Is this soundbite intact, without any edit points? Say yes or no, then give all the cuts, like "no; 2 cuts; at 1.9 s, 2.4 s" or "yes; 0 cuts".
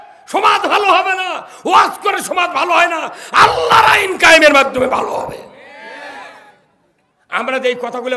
yes; 0 cuts